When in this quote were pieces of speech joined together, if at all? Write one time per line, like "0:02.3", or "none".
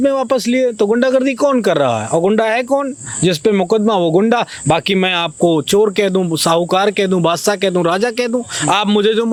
none